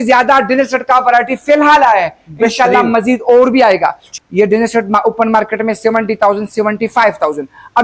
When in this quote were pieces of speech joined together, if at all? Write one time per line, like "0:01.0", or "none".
0:04.0